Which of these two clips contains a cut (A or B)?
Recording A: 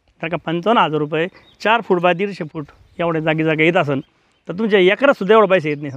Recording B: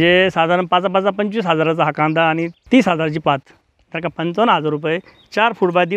B